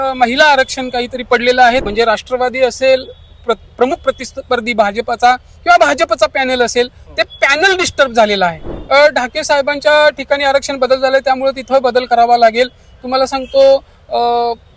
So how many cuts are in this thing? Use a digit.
2